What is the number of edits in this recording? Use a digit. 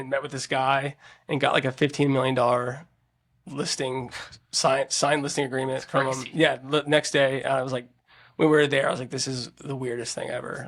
0